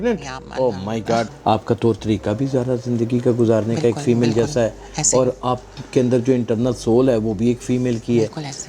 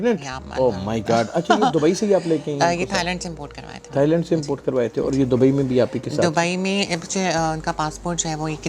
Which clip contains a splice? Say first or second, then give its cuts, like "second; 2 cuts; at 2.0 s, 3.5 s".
first; 1 cut; at 1.3 s